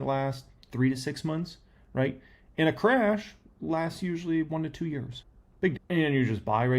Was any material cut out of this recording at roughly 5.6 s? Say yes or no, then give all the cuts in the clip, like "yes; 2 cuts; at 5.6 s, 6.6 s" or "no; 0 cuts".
yes; 1 cut; at 5.6 s